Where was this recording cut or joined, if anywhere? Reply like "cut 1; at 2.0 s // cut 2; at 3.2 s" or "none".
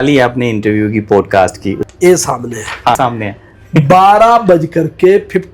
cut 1; at 1.8 s // cut 2; at 3.0 s